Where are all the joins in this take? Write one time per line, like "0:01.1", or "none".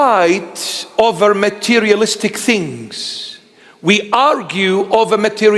none